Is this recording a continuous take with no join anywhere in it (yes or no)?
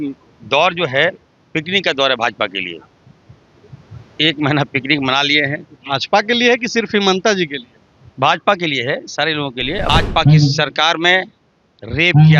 no